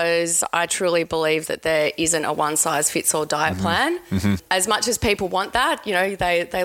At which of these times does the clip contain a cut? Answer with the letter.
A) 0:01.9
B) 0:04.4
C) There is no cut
B